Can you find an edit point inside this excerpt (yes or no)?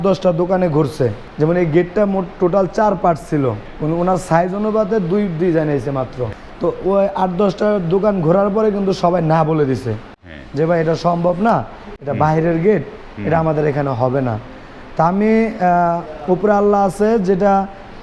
yes